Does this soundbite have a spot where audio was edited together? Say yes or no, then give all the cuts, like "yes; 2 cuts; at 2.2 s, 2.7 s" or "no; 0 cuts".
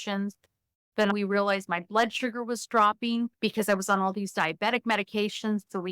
yes; 1 cut; at 1.1 s